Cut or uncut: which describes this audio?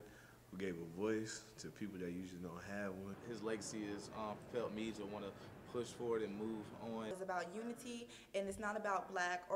cut